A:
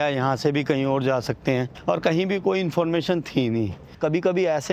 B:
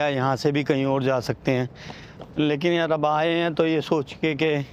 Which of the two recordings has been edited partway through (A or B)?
A